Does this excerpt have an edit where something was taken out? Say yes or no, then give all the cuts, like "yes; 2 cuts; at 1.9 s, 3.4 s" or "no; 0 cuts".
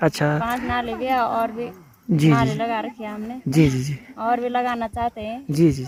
no; 0 cuts